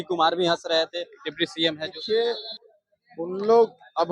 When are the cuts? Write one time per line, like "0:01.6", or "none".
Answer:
0:02.0